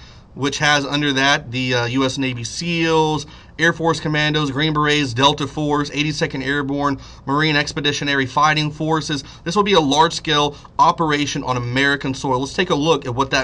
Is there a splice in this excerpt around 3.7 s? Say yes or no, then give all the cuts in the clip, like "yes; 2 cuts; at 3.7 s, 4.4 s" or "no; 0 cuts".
yes; 1 cut; at 3.7 s